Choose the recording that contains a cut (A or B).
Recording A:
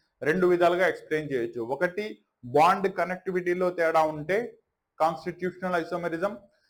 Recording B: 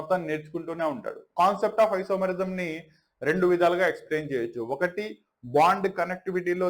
B